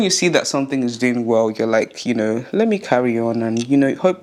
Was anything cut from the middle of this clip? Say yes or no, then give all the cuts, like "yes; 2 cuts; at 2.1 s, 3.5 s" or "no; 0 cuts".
no; 0 cuts